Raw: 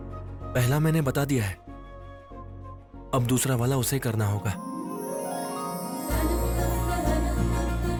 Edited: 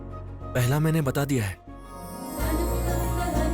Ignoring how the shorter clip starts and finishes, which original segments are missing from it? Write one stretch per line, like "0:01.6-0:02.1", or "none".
0:02.1-0:05.8